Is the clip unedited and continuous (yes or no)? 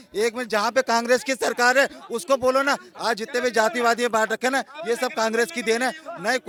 yes